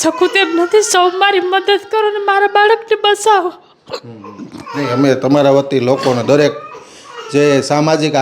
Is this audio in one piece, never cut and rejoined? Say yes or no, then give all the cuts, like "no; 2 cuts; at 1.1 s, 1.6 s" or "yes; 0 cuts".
yes; 0 cuts